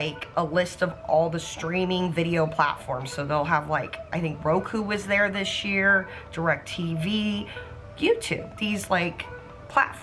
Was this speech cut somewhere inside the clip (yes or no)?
yes